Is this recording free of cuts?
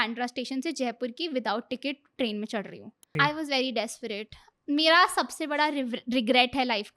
no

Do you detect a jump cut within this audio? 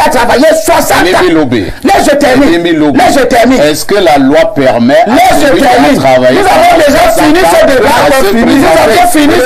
no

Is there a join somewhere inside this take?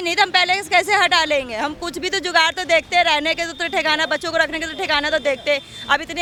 no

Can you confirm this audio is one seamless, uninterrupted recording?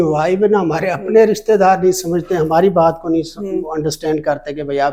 yes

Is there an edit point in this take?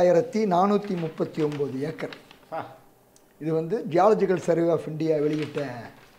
no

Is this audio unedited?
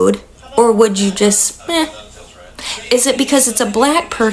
yes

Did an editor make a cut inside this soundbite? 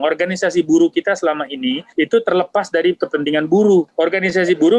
yes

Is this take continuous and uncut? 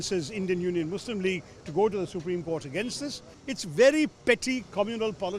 no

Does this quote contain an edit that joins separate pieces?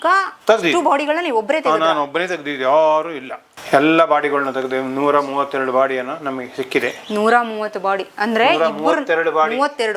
no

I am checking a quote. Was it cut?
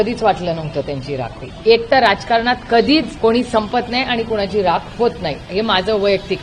yes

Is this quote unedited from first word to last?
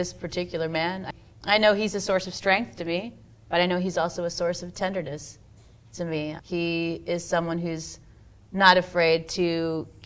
no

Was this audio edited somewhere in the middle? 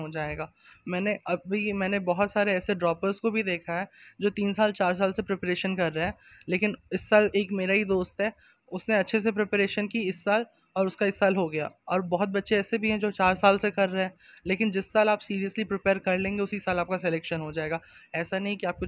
no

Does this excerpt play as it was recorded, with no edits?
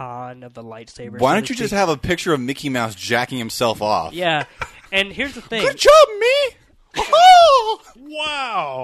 yes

